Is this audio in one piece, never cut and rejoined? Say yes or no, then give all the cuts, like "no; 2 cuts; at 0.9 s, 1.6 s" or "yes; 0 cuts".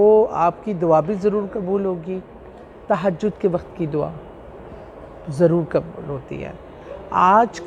yes; 0 cuts